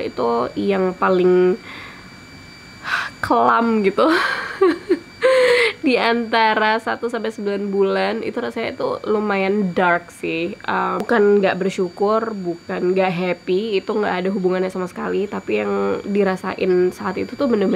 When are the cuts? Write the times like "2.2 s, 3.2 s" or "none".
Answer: none